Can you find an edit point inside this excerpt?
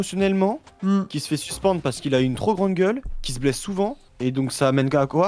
yes; 1 cut; at 4.1 s

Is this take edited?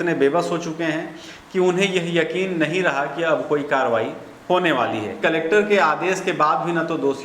yes; 1 cut; at 5.2 s

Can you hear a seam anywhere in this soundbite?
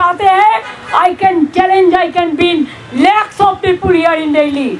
no; 0 cuts

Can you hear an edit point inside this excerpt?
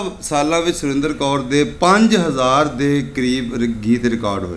yes; 1 cut; at 1.7 s

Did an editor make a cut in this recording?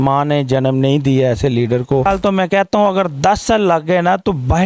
yes; 1 cut; at 2.1 s

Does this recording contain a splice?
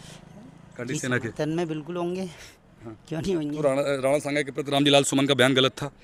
no; 0 cuts

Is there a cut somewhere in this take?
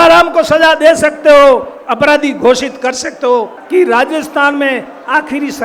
yes; 1 cut; at 3.6 s

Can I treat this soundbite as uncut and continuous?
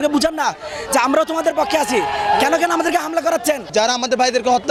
yes; 0 cuts

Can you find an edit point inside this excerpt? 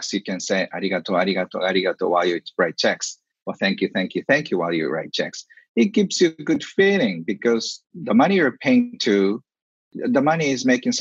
yes; 2 cuts; at 7.8 s, 10.0 s

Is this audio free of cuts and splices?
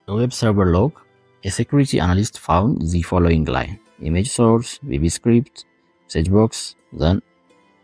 yes; 0 cuts

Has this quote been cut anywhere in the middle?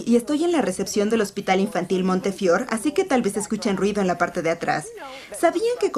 yes; 1 cut; at 4.5 s

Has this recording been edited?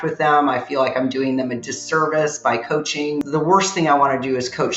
yes; 1 cut; at 3.2 s

